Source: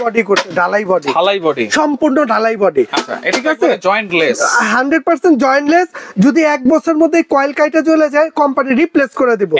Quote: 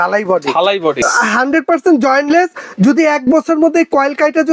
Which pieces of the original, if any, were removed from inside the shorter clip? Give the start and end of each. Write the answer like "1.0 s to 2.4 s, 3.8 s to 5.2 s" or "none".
1.6 s to 4.4 s

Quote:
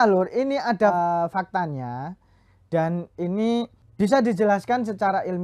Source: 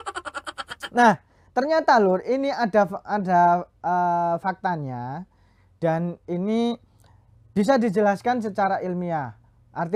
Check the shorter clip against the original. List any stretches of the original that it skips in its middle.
2.9 s to 4.0 s, 6.9 s to 7.4 s

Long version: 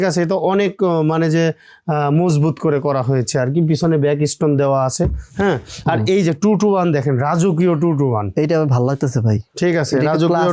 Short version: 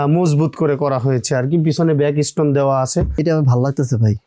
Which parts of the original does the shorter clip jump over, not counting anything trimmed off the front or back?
5.2 s to 8.4 s

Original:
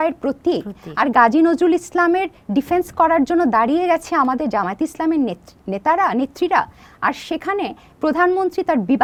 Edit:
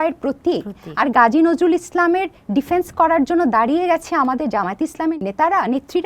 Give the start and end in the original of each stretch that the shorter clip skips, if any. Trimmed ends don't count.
5.2 s to 5.6 s

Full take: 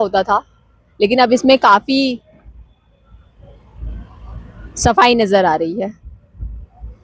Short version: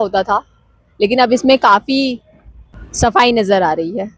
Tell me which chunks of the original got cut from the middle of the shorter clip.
3.1 s to 5.0 s

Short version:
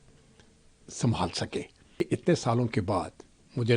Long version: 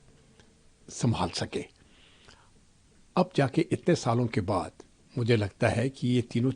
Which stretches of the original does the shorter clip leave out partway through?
2.0 s to 3.6 s

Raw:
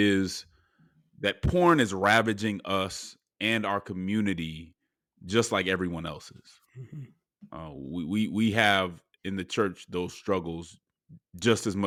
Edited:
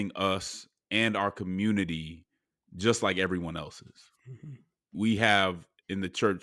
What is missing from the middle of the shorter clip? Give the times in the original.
7.4 s to 8.3 s

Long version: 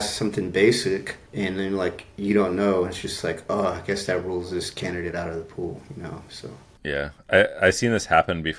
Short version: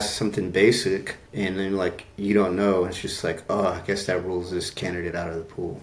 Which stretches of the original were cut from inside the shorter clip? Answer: none

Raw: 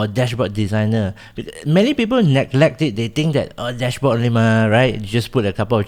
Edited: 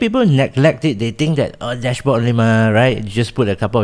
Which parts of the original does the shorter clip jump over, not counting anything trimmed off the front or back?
none

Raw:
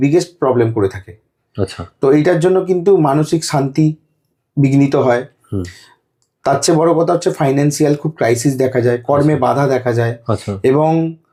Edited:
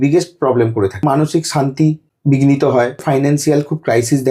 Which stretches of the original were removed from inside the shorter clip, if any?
1.0 s to 3.0 s, 4.1 s to 4.4 s, 5.3 s to 7.4 s

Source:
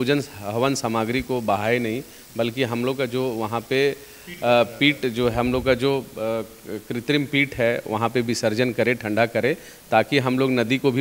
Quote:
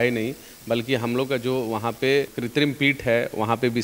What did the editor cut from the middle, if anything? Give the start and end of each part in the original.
4.1 s to 6.9 s

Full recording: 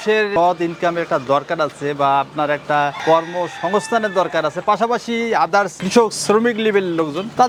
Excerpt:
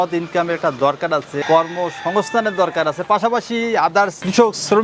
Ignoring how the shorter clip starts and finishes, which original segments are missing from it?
1.9 s to 3.0 s

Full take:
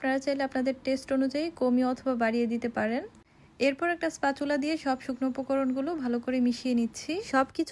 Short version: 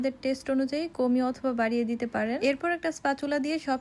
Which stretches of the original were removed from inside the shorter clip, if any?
3.0 s to 3.6 s

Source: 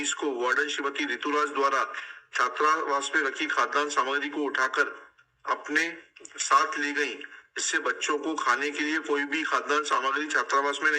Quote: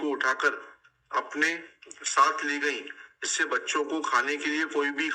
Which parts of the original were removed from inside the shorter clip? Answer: none

